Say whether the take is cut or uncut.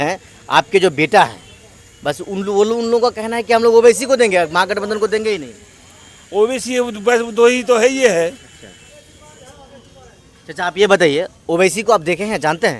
uncut